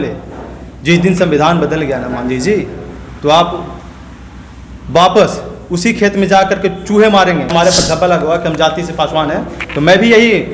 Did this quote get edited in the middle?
yes; 1 cut; at 7.5 s

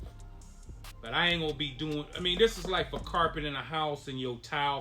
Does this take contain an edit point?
yes; 1 cut; at 1.0 s

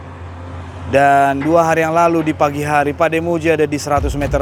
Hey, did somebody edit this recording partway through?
no; 0 cuts

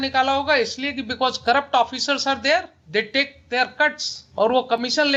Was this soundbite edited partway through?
no; 0 cuts

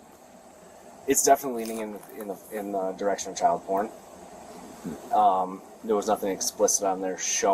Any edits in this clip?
no; 0 cuts

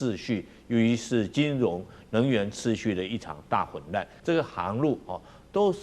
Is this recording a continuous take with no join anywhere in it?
no; 1 cut; at 4.1 s

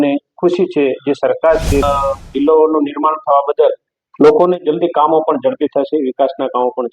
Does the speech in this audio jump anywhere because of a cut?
yes; 1 cut; at 1.8 s

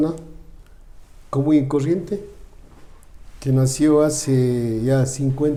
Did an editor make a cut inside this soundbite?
no; 0 cuts

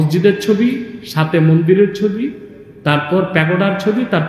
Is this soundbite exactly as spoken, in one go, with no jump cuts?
yes; 0 cuts

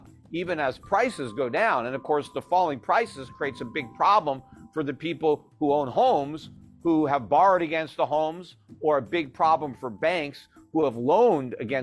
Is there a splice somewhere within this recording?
no; 0 cuts

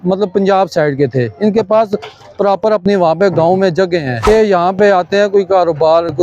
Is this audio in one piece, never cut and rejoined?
no; 1 cut; at 4.3 s

